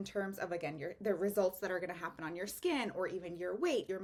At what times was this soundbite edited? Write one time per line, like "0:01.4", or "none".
none